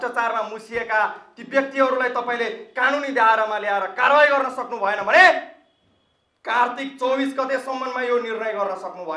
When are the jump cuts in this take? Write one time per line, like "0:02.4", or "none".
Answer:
none